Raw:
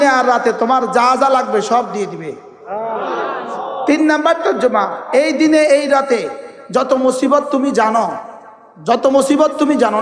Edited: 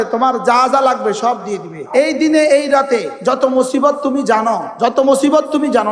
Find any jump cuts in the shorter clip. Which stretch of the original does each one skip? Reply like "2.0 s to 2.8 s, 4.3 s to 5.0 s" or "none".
2.3 s to 5.0 s, 6.3 s to 6.6 s, 8.2 s to 8.7 s